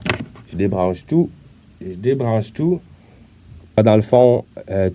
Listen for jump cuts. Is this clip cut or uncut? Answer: cut